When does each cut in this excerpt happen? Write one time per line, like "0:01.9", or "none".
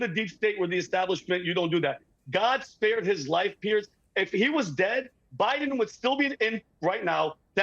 0:04.0